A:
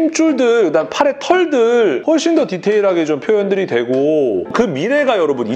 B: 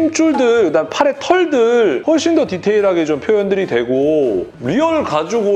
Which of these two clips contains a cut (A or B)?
A